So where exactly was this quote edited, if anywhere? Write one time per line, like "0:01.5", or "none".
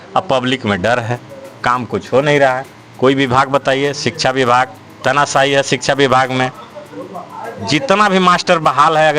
none